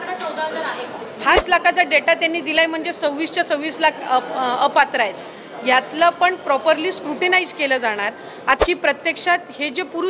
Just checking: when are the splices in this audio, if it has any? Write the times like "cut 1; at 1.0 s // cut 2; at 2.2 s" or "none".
cut 1; at 1.4 s // cut 2; at 8.6 s